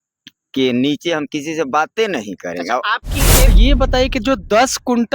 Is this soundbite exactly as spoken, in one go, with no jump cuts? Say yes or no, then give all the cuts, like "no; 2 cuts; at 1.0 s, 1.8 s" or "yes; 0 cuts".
no; 1 cut; at 3.5 s